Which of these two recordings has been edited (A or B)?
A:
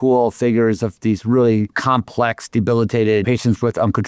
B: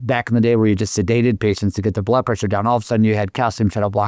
A